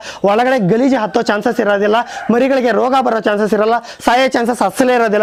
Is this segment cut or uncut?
uncut